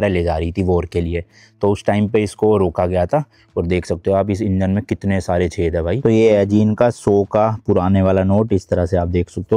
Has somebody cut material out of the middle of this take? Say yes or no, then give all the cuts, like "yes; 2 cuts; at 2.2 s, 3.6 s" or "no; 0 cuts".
yes; 1 cut; at 6.0 s